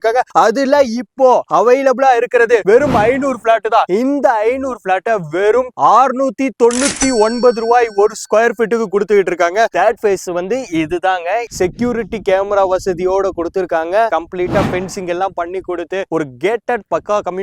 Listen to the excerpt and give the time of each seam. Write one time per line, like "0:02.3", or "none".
0:09.7
0:14.1